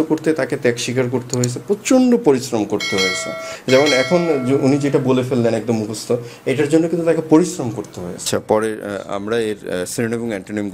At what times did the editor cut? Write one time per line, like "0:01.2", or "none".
0:08.3